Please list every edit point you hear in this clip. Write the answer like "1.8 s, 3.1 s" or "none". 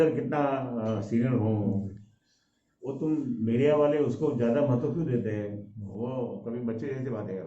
5.9 s